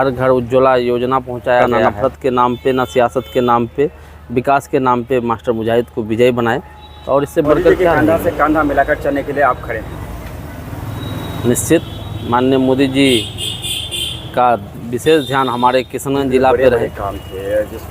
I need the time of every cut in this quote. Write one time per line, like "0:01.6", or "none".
0:01.8
0:07.9
0:16.7